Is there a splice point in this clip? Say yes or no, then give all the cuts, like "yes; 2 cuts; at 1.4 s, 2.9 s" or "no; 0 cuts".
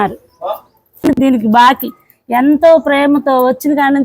yes; 1 cut; at 1.0 s